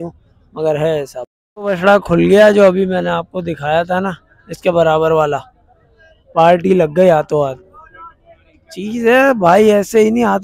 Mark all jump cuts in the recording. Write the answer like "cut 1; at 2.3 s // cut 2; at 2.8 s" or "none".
cut 1; at 1.2 s